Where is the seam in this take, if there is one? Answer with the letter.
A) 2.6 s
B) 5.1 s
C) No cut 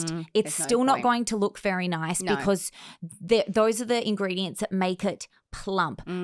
C